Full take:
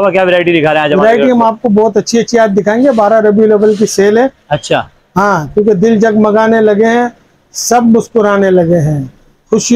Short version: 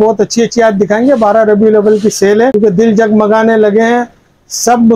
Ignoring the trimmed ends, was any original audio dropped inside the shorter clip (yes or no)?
yes